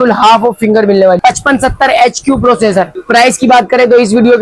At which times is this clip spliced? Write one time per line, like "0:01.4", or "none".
0:01.2
0:03.0